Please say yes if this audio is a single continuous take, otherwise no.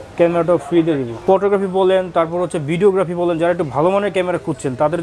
no